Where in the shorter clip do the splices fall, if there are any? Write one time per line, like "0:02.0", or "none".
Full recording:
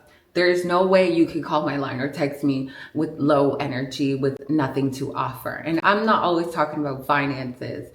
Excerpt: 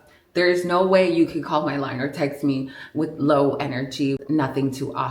0:04.2